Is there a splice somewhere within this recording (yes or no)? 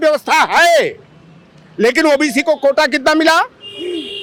no